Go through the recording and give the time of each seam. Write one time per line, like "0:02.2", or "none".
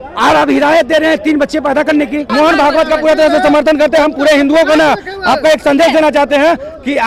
0:02.3